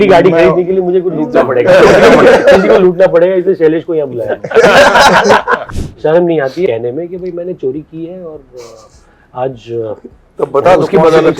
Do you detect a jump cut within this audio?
yes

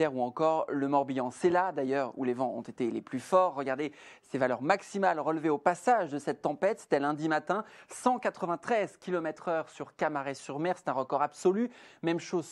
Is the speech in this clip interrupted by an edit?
yes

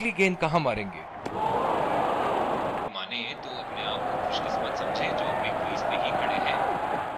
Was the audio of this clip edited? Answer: no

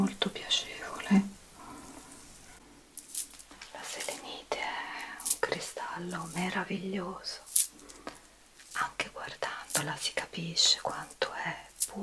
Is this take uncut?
no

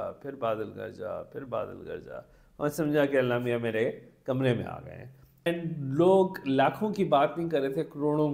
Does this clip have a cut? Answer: yes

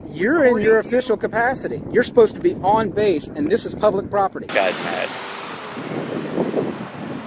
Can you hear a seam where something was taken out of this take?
yes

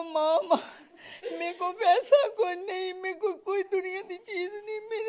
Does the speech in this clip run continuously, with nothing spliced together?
yes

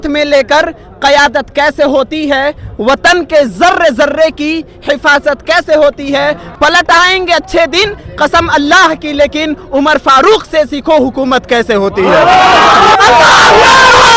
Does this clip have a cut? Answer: yes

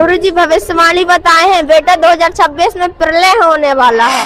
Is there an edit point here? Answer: no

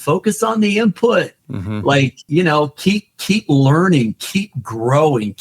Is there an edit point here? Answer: yes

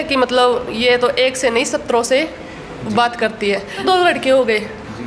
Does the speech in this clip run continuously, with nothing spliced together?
no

